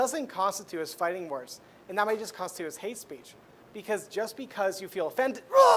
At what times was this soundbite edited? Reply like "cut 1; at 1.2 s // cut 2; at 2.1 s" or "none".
none